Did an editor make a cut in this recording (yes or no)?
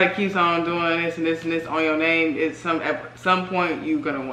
no